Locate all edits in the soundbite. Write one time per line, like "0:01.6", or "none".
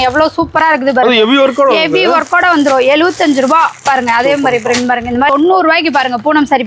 0:05.3

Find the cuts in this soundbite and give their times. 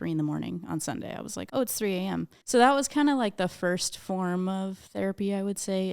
0:01.4
0:02.4

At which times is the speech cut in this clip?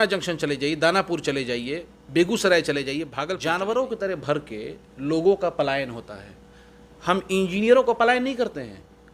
0:03.2

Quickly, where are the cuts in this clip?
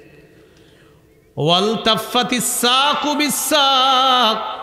none

